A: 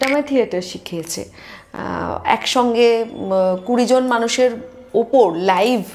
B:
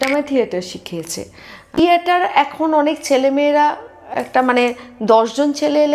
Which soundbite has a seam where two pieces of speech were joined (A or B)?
B